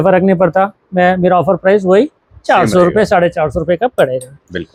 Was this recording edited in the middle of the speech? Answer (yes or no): no